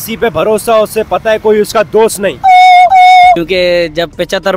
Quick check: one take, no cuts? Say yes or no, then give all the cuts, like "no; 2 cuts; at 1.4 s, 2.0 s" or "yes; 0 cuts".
yes; 0 cuts